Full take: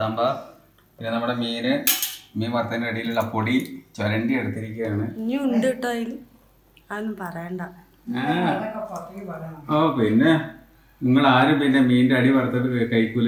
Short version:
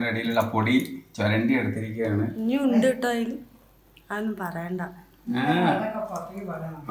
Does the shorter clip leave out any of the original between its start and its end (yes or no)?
no